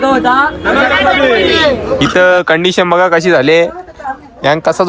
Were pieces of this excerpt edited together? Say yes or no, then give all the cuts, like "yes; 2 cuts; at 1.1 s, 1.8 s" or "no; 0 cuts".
yes; 1 cut; at 2.0 s